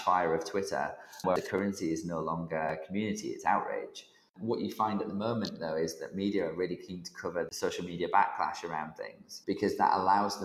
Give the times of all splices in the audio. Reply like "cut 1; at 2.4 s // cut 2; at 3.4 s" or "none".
cut 1; at 1.3 s // cut 2; at 3.9 s // cut 3; at 7.5 s // cut 4; at 9.4 s